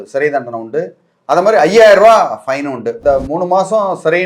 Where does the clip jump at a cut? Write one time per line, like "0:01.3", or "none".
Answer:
0:02.9